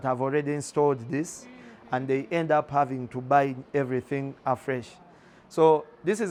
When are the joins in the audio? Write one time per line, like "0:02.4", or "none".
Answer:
none